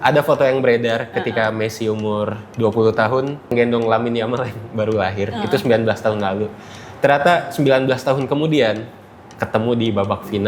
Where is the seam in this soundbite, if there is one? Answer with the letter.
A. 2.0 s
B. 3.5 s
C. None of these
B